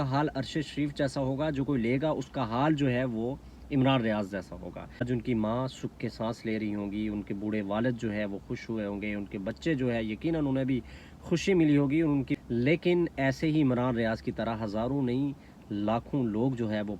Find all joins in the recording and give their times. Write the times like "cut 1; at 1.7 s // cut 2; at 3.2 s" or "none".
cut 1; at 5.0 s // cut 2; at 12.4 s

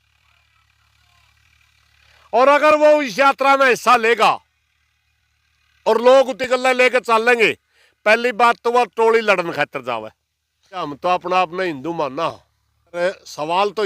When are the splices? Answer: cut 1; at 10.9 s // cut 2; at 12.9 s

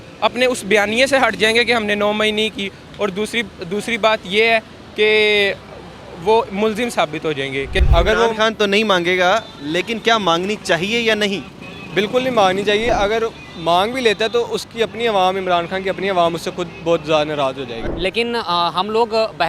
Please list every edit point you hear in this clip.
cut 1; at 7.8 s // cut 2; at 12.9 s // cut 3; at 17.8 s

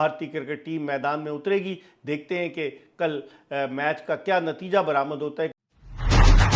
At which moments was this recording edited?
cut 1; at 5.6 s

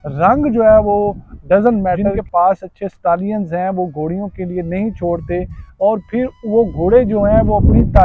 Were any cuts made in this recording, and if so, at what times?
cut 1; at 2.1 s

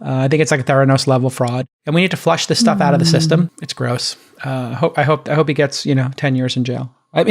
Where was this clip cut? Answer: cut 1; at 1.7 s // cut 2; at 3.6 s

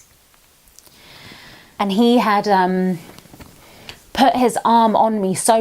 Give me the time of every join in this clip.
cut 1; at 1.7 s

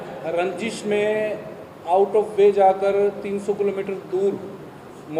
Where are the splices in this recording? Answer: none

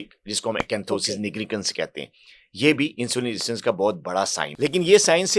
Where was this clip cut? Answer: cut 1; at 4.4 s

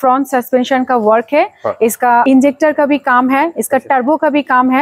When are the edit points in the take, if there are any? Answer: cut 1; at 2.2 s

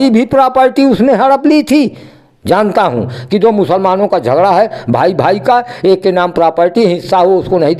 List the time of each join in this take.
none

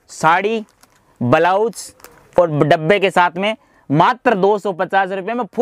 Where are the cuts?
none

